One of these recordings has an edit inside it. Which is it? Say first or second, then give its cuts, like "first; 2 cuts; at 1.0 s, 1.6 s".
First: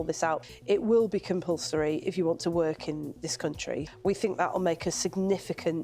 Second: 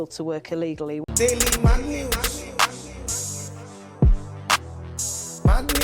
second; 1 cut; at 1.0 s